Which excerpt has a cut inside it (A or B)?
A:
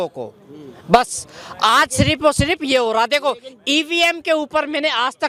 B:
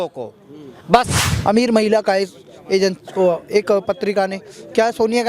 B